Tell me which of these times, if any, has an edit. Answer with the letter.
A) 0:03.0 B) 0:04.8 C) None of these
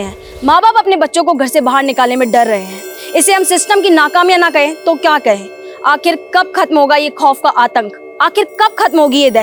C